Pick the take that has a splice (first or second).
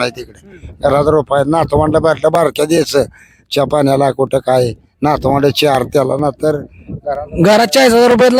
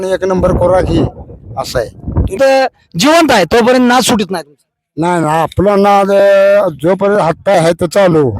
second